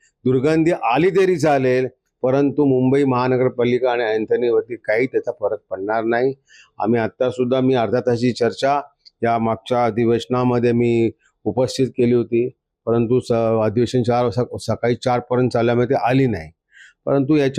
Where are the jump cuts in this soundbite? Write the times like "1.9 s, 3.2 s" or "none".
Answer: none